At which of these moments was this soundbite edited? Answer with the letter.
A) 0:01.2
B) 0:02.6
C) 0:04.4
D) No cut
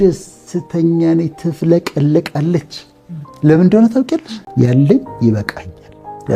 C